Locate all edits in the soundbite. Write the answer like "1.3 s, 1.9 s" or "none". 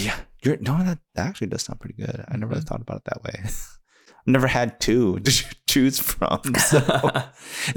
none